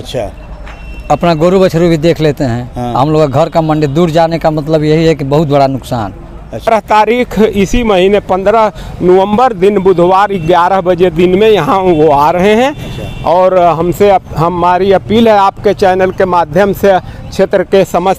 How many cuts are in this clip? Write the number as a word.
one